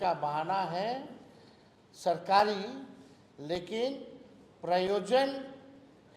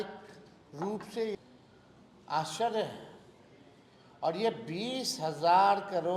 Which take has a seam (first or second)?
second